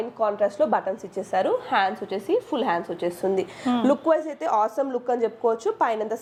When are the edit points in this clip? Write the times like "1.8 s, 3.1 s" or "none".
none